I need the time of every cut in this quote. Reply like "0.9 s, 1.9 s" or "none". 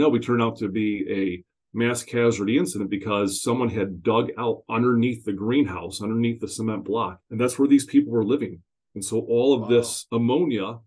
10.0 s